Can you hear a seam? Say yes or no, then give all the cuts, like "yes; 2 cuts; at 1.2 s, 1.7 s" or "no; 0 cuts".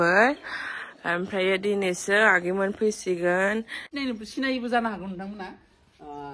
yes; 1 cut; at 3.8 s